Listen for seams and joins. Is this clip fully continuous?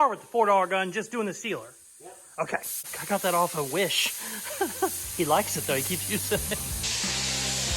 no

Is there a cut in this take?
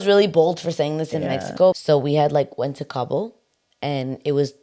no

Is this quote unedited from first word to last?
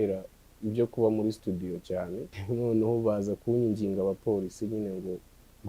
no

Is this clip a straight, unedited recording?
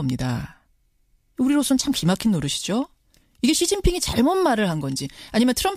yes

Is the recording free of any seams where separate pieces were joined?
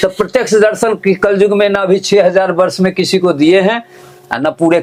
yes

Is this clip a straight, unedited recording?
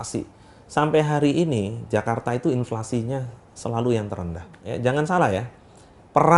no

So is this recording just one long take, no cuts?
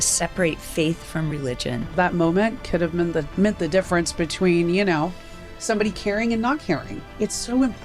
no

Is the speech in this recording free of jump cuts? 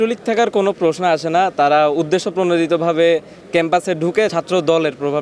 no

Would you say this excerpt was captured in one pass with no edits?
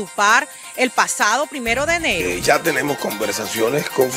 no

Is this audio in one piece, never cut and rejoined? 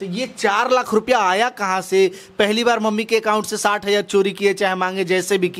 yes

